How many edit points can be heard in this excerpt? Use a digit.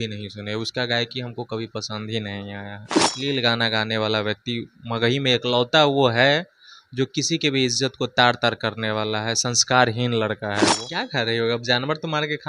2